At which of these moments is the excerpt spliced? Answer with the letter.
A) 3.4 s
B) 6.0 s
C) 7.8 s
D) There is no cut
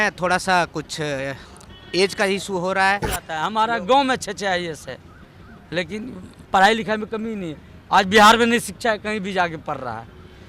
A